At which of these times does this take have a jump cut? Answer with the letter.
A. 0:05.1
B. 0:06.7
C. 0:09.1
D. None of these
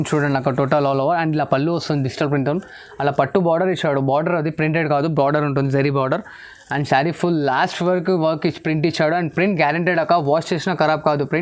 D